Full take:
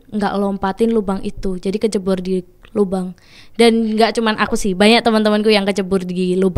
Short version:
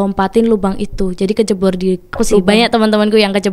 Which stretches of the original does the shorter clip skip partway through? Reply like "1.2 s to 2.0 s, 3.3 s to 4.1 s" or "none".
2.8 s to 4.6 s